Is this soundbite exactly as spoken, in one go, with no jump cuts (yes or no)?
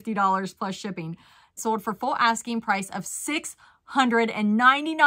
no